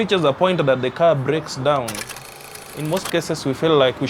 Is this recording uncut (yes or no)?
no